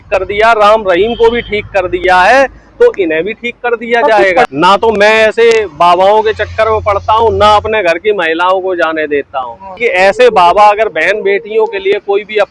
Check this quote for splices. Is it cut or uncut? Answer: cut